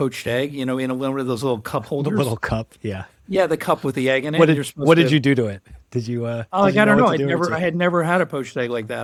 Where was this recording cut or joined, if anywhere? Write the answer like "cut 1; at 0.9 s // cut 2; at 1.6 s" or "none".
none